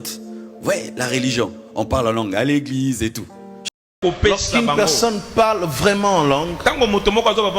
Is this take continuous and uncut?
no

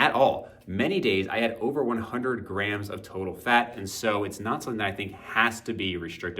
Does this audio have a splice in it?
yes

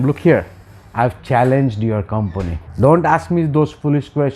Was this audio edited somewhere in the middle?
yes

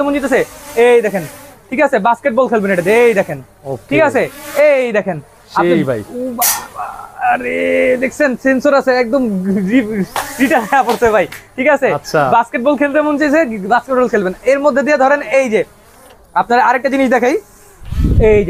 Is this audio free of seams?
yes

